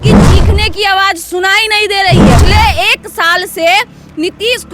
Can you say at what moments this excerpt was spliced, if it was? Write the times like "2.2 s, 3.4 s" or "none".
2.4 s